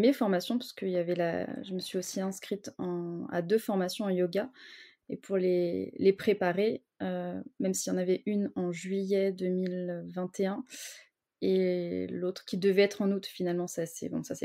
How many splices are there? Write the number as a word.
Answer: zero